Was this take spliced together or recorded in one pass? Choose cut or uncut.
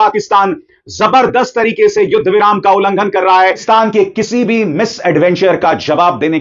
cut